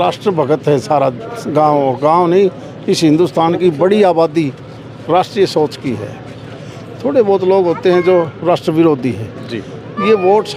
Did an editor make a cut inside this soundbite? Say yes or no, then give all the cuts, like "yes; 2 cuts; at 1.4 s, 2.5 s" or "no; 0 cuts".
no; 0 cuts